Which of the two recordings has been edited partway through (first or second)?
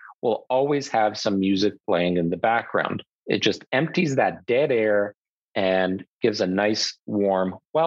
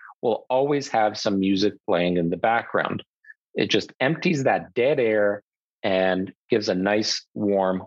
first